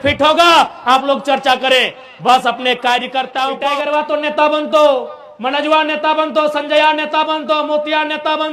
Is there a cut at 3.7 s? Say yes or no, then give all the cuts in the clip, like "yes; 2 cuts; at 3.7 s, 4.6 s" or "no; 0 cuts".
yes; 1 cut; at 3.7 s